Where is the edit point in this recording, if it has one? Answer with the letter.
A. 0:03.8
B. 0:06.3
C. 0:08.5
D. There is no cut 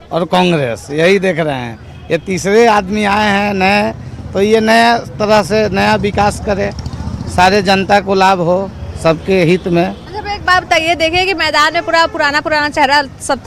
A